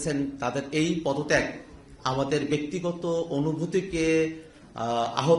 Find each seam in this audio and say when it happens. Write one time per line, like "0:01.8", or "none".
none